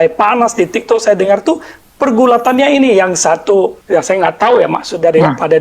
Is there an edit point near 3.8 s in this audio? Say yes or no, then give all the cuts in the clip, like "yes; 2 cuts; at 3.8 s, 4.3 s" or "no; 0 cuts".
yes; 1 cut; at 3.8 s